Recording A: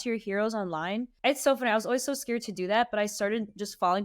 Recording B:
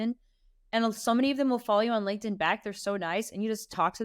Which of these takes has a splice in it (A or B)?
A